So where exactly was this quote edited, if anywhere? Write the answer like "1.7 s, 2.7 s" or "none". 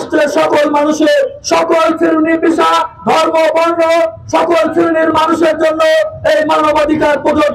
none